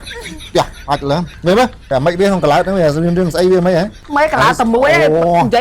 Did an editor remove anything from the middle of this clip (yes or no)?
yes